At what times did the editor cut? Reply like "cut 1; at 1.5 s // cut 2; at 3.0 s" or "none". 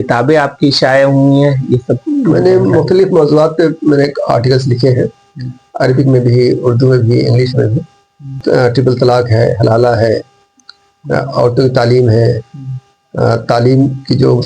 cut 1; at 8.3 s